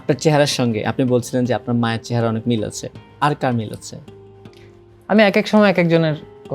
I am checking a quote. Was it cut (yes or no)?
no